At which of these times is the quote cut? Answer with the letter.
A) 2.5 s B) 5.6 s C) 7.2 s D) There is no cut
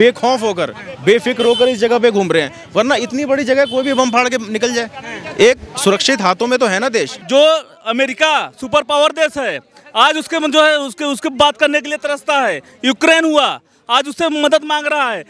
C